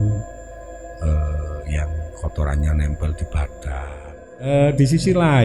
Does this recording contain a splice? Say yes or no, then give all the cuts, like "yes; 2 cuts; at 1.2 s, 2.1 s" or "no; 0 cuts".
yes; 1 cut; at 4.4 s